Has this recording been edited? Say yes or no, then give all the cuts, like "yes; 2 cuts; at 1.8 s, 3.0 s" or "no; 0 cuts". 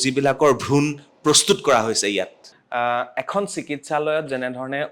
no; 0 cuts